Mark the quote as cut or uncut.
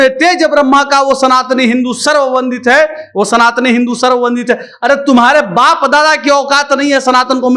uncut